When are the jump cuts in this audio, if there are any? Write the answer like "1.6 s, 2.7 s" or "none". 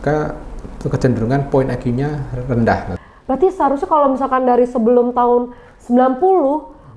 2.9 s

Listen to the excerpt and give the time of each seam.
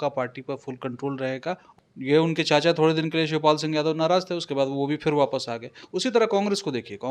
1.6 s

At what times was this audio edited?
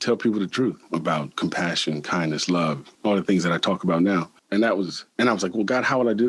0.8 s, 2.9 s, 4.7 s

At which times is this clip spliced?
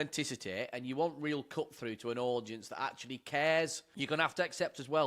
3.9 s

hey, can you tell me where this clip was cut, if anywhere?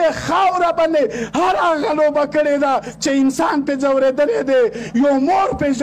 none

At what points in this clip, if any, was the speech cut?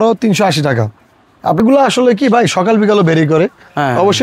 1.6 s

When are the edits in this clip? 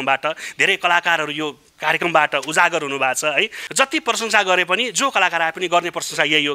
none

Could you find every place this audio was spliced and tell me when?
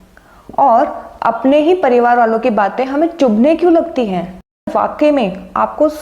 4.7 s

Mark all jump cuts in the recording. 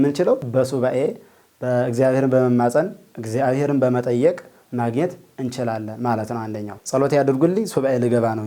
6.7 s

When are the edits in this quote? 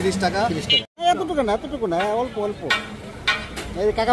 1.0 s

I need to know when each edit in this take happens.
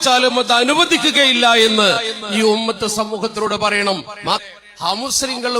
4.4 s

